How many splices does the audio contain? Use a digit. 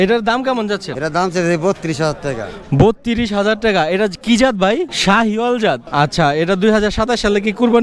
3